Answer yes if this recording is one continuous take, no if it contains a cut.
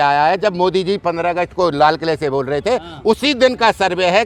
yes